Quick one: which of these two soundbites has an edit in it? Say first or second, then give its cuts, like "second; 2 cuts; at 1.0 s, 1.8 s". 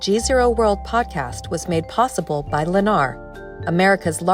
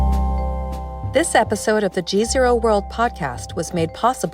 second; 1 cut; at 1.0 s